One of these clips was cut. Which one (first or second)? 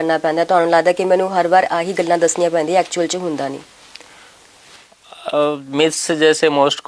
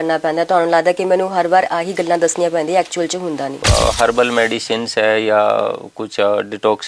second